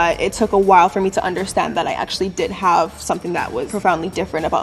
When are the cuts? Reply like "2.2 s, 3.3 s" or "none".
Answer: 3.7 s